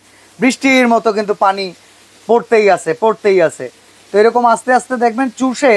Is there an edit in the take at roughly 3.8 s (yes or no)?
no